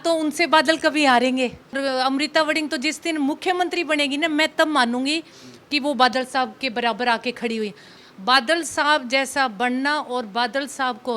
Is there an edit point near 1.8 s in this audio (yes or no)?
yes